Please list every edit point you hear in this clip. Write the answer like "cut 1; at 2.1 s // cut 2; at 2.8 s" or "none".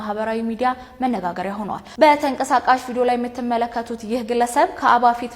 cut 1; at 1.8 s